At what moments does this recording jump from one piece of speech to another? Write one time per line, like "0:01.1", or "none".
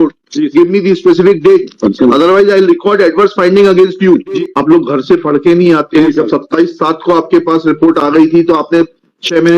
0:01.7
0:04.3
0:06.1